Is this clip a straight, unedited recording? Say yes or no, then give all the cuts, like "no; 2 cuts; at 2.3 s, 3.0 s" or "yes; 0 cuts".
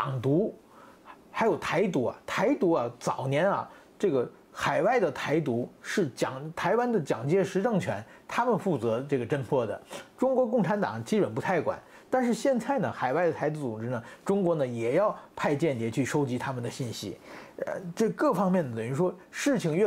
yes; 0 cuts